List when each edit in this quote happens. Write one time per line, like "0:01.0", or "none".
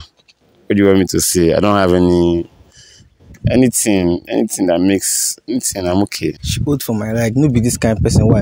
0:06.4